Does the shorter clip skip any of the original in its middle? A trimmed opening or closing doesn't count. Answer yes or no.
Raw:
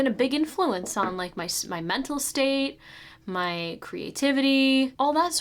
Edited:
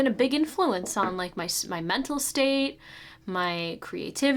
no